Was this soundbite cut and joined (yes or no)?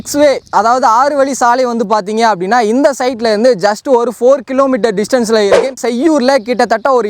yes